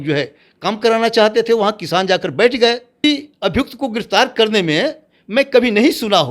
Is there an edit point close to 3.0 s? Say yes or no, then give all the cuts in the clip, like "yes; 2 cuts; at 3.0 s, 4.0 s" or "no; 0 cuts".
yes; 1 cut; at 3.0 s